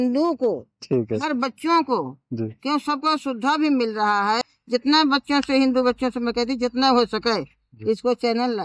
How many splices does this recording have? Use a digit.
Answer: 1